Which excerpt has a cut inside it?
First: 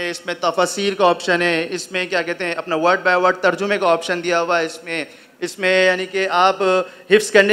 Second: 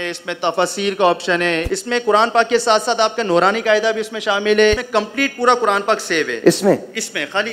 second; 2 cuts; at 1.7 s, 4.8 s

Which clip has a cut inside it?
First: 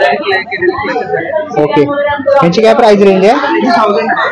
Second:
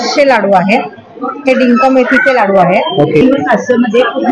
second; 1 cut; at 3.2 s

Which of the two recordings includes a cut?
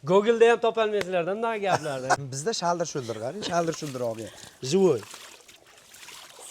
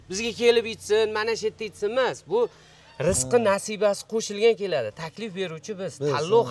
first; 1 cut; at 2.3 s

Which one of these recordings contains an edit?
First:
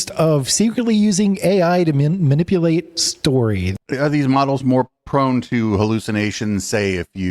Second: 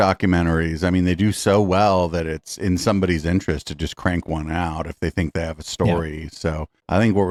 first; 1 cut; at 3.7 s

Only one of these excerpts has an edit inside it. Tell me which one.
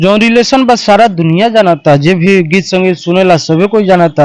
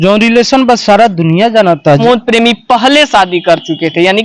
second; 1 cut; at 2.0 s

